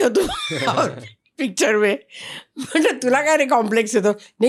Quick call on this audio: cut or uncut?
uncut